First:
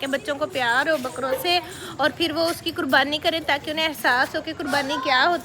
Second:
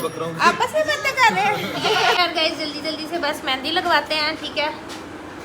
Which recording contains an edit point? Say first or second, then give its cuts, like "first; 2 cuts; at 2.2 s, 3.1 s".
second; 1 cut; at 2.2 s